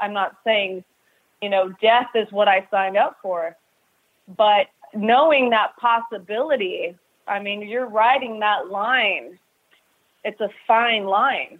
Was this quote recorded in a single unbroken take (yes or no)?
yes